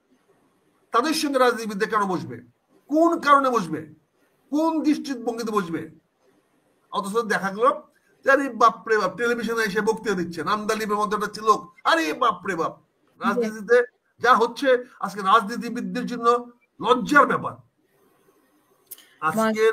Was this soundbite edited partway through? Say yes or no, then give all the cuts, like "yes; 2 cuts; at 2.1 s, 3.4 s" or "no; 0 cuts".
yes; 1 cut; at 13.2 s